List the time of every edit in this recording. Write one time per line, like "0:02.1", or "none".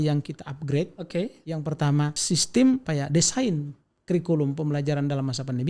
0:02.2
0:02.9